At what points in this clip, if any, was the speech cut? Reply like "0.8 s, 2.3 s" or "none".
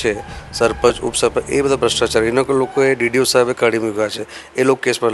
none